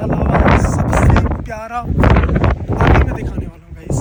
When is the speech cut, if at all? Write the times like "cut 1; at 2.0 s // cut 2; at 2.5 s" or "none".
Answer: none